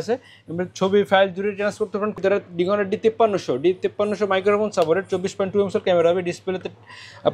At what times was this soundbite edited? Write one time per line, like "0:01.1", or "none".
0:02.2